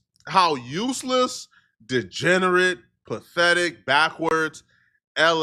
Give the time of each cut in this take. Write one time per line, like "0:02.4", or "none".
none

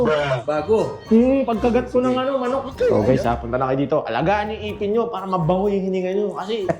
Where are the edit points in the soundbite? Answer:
0:02.9

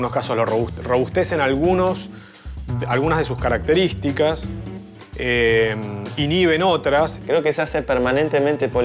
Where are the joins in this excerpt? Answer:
0:07.2

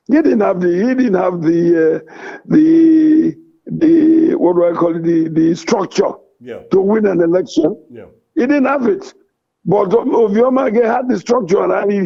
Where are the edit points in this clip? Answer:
none

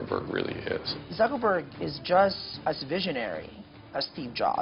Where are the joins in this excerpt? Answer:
0:00.9
0:02.5

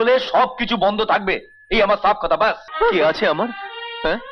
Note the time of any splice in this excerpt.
0:02.7

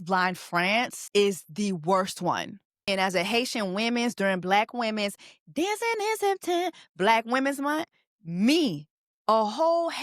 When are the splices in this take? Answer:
0:01.0
0:02.8

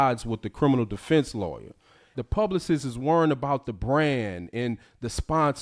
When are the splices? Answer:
0:02.1

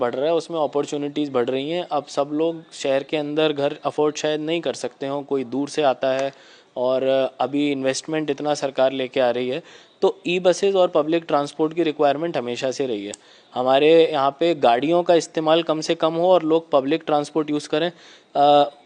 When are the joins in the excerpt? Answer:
none

